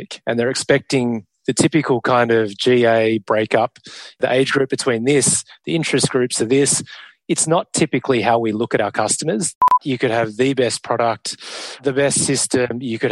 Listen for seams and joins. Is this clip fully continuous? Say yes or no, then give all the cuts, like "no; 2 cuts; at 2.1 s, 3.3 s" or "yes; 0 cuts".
no; 3 cuts; at 4.2 s, 9.6 s, 11.8 s